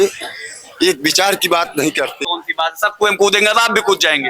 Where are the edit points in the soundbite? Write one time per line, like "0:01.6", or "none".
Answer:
0:02.2